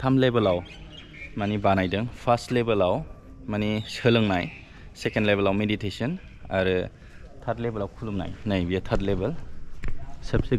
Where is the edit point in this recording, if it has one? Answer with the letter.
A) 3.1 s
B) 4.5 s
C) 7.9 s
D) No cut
D